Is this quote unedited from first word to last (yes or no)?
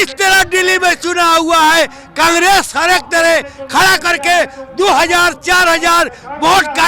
yes